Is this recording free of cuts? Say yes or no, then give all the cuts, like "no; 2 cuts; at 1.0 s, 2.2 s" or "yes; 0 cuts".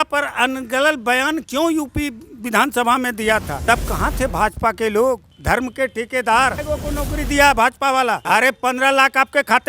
no; 4 cuts; at 3.5 s, 5.3 s, 6.6 s, 8.2 s